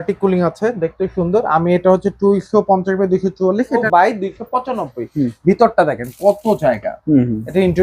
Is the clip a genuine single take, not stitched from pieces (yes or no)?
no